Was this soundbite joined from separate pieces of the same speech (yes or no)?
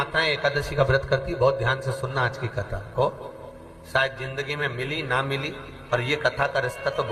no